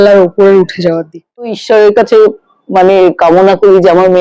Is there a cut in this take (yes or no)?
yes